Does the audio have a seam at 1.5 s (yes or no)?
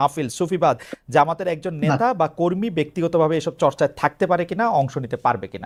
no